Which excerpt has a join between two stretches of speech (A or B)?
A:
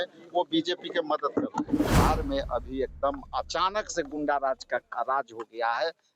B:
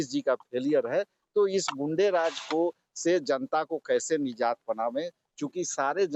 A